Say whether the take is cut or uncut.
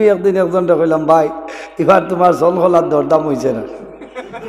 uncut